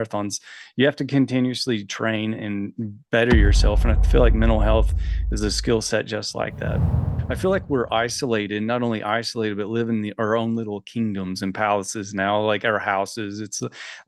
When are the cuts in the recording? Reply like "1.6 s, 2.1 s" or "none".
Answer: 7.1 s